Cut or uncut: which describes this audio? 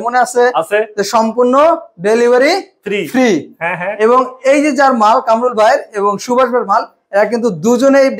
uncut